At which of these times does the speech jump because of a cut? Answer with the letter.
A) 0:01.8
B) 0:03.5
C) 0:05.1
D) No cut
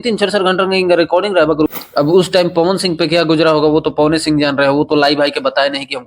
A